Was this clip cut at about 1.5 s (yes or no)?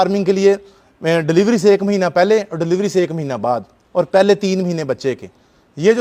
no